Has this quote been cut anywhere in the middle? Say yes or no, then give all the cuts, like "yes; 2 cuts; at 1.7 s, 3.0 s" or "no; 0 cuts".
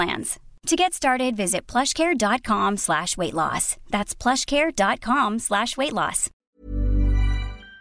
yes; 1 cut; at 6.4 s